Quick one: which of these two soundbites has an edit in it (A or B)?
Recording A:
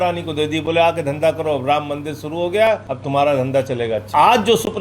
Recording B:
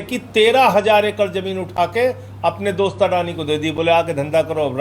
A